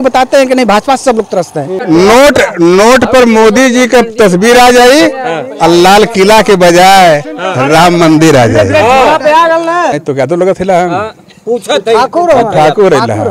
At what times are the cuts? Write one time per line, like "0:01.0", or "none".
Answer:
0:01.8
0:10.0